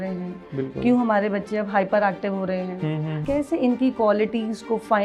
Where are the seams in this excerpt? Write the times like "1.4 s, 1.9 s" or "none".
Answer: 3.1 s